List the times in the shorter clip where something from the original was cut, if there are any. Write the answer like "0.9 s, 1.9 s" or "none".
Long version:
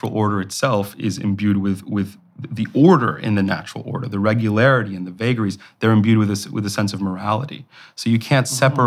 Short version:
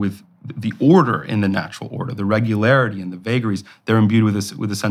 none